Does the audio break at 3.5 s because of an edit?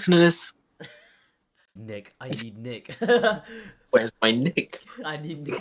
no; 1 cut; at 1.7 s

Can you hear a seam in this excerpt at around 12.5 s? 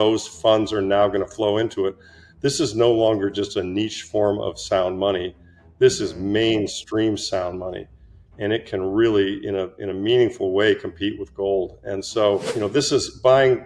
yes; 1 cut; at 12.5 s

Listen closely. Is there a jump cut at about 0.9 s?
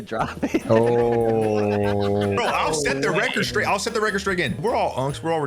no; 2 cuts; at 2.2 s, 4.6 s

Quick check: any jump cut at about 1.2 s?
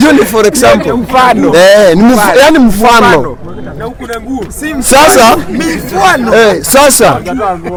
no; 0 cuts

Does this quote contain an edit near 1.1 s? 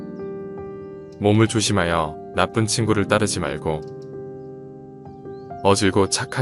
no; 0 cuts

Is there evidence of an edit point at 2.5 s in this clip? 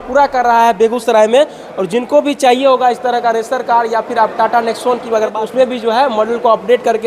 no; 1 cut; at 5.3 s

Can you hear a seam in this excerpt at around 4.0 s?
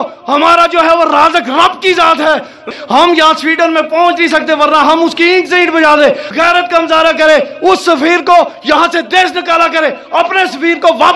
no; 2 cuts; at 2.7 s, 6.3 s

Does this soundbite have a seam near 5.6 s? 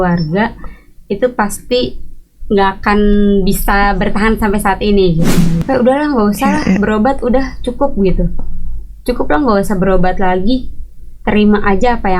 yes; 1 cut; at 5.6 s

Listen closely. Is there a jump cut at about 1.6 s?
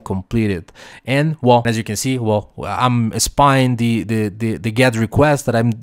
yes; 1 cut; at 1.6 s

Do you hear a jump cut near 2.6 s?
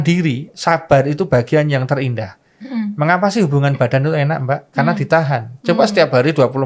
no; 0 cuts

